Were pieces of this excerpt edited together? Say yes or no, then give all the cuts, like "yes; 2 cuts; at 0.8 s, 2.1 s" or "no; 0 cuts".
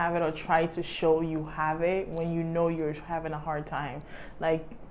no; 0 cuts